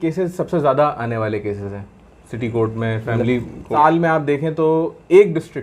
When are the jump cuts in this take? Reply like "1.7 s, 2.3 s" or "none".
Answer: 3.7 s